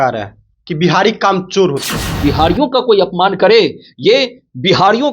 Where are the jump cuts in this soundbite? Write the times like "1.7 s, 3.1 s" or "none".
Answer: 2.2 s